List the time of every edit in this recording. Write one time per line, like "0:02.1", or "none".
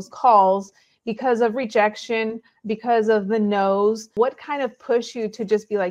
0:04.1